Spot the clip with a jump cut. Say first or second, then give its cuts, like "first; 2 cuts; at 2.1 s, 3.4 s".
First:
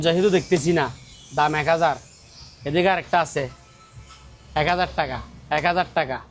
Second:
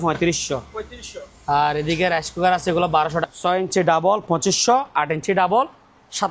second; 1 cut; at 3.2 s